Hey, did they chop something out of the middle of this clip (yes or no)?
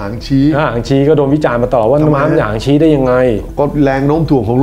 no